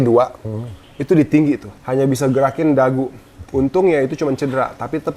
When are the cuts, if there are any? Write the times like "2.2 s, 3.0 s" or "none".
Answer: 1.7 s